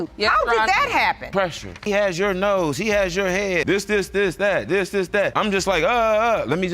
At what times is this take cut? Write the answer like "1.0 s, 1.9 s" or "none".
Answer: 1.8 s, 3.6 s, 5.3 s